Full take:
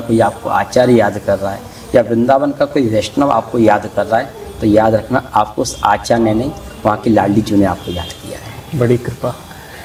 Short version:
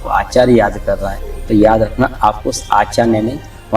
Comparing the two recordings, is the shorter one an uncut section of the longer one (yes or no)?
no